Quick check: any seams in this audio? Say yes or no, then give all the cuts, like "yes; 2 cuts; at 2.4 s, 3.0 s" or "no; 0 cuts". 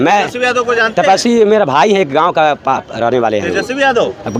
no; 0 cuts